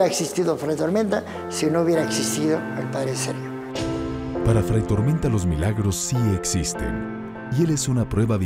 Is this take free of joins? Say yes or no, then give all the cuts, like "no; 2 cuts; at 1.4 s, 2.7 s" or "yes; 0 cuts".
yes; 0 cuts